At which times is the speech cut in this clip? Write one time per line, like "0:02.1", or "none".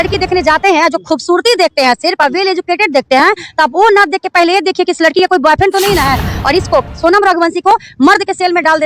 0:06.3